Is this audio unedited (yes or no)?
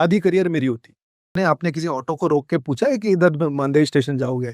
no